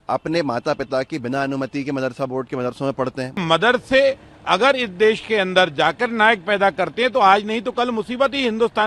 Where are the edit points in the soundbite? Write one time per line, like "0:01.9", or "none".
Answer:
0:03.4